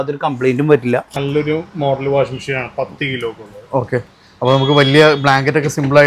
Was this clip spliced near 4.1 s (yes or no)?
no